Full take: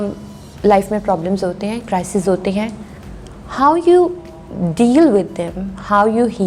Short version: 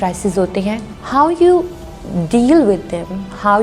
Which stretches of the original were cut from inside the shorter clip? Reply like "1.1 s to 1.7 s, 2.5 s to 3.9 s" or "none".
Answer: 2.8 s to 3.4 s